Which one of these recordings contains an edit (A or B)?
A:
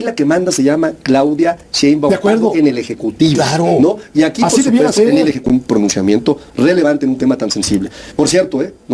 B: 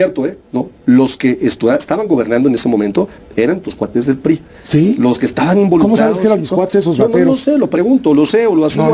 A